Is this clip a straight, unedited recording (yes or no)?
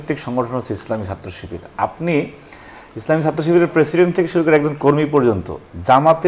yes